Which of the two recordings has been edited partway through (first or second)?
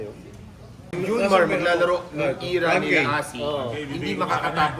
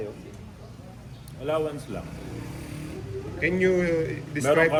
first